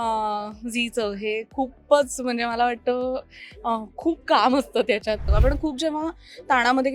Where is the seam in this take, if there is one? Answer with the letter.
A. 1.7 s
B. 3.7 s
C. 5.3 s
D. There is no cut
C